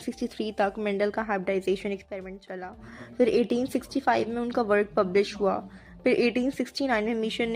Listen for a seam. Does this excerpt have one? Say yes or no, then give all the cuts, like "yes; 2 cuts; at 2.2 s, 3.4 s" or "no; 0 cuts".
no; 0 cuts